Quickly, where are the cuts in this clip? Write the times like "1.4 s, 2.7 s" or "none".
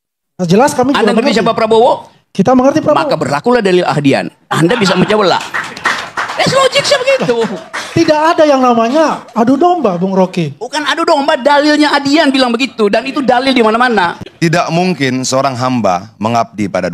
none